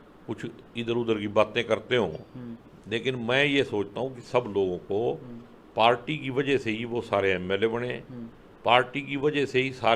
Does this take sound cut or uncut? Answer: uncut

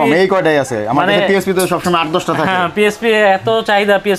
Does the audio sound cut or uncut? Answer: uncut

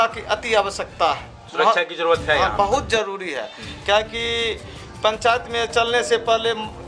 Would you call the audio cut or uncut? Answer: uncut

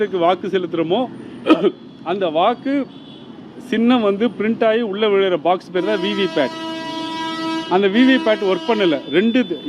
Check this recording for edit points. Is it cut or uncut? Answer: uncut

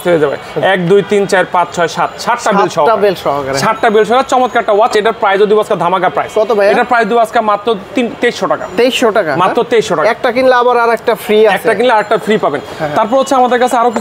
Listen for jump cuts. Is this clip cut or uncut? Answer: uncut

